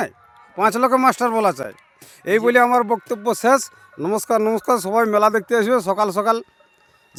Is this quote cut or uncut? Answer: uncut